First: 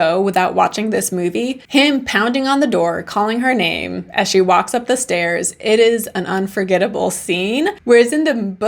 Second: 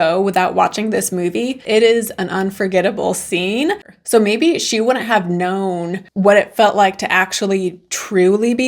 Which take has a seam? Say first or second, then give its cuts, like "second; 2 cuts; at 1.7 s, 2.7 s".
second; 2 cuts; at 1.6 s, 3.8 s